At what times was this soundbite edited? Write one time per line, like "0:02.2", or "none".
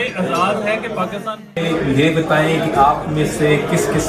0:01.6